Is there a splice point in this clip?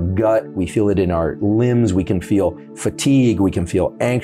no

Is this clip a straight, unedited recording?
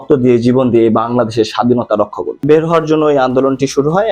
no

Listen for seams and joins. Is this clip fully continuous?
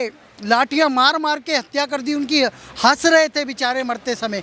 yes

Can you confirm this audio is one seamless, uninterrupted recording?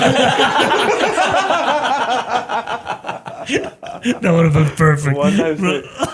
yes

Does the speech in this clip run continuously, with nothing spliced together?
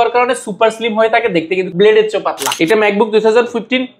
no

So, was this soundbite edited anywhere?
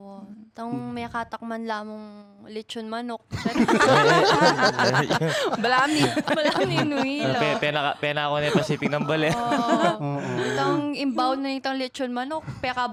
no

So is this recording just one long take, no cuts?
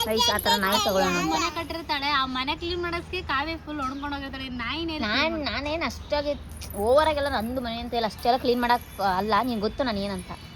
yes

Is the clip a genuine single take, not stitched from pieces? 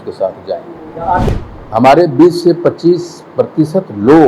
no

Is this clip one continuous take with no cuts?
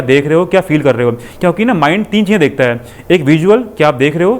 yes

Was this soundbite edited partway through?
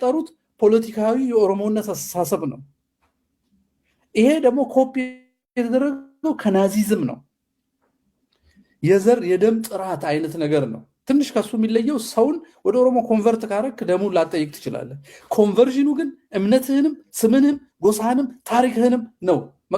yes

